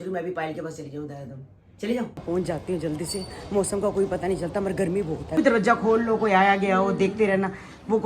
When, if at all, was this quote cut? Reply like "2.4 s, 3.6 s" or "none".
2.2 s, 5.4 s